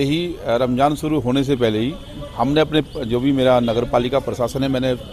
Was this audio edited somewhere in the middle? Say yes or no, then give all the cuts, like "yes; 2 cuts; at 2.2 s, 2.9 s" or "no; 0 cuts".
no; 0 cuts